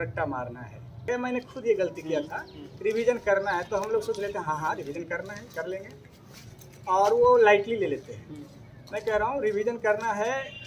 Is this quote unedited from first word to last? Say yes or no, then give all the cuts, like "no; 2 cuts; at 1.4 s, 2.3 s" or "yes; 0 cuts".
no; 1 cut; at 1.0 s